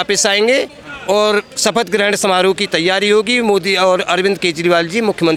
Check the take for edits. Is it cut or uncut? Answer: uncut